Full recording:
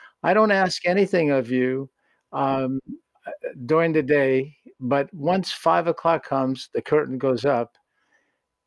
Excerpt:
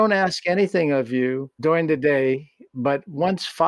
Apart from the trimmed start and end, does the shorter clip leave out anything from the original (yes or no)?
yes